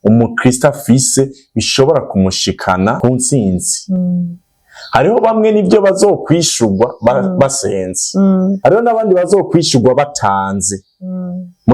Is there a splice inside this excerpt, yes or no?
yes